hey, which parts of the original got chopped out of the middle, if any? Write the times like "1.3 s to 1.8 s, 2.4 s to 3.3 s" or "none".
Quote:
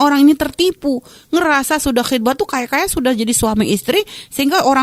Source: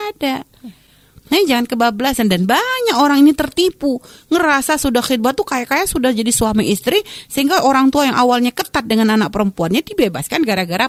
none